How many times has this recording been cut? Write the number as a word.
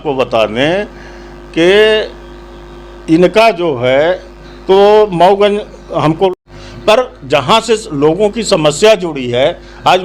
one